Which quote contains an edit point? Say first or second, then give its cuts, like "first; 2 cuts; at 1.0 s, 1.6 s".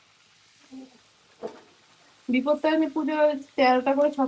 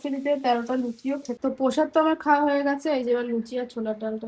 second; 1 cut; at 1.3 s